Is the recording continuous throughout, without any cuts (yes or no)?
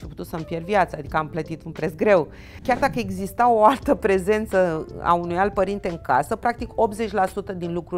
no